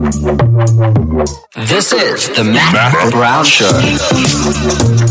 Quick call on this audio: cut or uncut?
uncut